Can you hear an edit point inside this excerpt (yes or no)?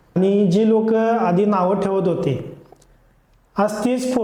no